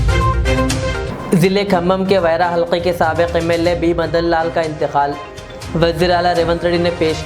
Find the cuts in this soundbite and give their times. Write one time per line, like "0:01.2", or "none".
none